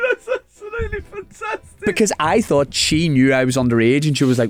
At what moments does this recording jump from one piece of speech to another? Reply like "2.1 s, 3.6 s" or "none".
none